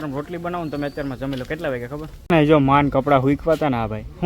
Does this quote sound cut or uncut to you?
cut